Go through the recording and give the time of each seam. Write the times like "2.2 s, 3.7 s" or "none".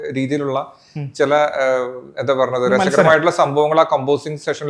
none